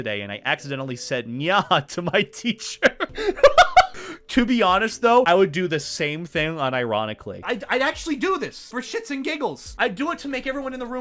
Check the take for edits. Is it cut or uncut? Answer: uncut